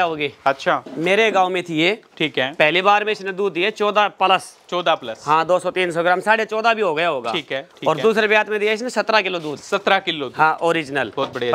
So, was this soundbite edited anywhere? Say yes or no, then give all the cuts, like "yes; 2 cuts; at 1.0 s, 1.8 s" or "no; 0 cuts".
no; 0 cuts